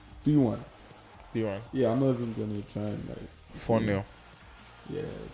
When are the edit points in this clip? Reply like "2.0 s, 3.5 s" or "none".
none